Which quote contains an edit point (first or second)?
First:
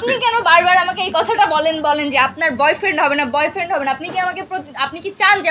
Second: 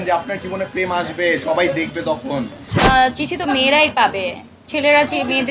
second